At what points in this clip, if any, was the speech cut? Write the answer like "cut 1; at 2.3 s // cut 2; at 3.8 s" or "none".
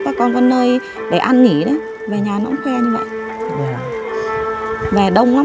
none